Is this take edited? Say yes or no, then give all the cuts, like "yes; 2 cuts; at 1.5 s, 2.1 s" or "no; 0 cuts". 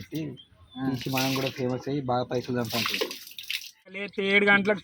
yes; 1 cut; at 3.9 s